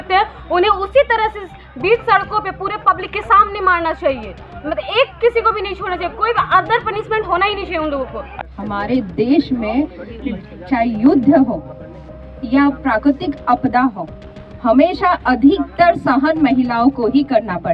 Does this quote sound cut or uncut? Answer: uncut